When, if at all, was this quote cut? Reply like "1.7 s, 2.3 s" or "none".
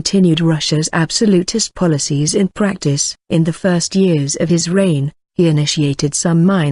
1.1 s